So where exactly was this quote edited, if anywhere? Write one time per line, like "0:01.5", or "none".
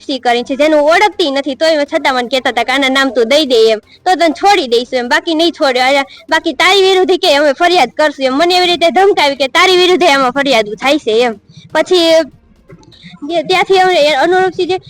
none

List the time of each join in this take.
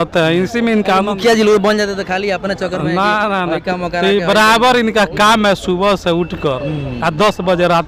none

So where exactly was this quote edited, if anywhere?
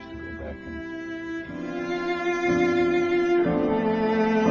none

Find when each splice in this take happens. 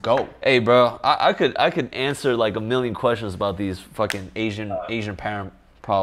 none

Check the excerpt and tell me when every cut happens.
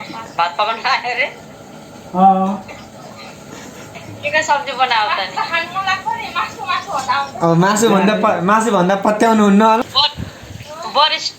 0:04.1
0:09.8

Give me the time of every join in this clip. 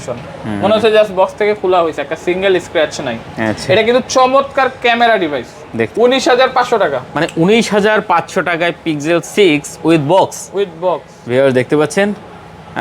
0:05.9

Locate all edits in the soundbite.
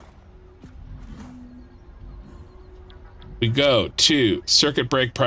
none

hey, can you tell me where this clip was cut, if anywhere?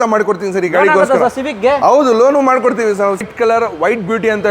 0:03.2

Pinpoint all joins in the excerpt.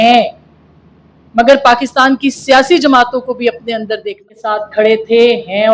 0:04.3

